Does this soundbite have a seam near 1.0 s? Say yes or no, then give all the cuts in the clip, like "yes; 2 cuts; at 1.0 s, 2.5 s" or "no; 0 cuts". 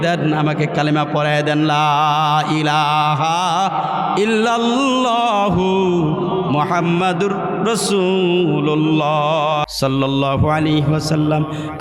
no; 1 cut; at 9.7 s